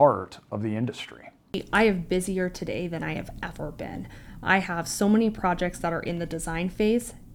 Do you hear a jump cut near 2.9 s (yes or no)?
no